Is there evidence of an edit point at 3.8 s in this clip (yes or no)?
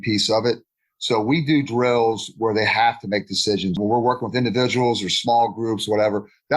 yes